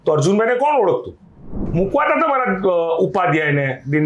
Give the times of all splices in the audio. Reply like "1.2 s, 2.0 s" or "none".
1.6 s